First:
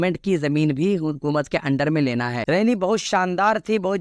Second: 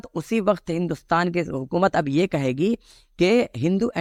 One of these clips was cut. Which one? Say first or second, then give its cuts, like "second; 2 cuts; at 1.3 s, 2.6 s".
first; 1 cut; at 2.4 s